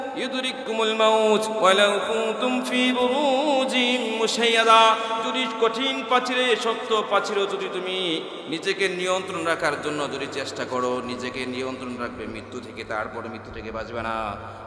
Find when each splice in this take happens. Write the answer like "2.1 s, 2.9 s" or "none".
none